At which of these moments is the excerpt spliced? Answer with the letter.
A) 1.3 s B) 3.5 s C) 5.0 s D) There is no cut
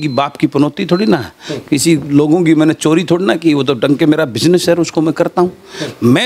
D